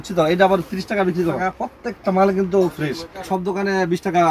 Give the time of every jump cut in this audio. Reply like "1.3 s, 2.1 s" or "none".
1.4 s, 3.3 s